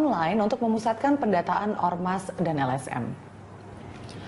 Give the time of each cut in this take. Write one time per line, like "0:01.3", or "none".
0:01.2